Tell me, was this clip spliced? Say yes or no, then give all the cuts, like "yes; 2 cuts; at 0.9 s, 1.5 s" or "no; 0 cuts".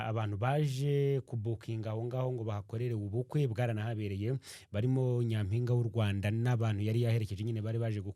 no; 0 cuts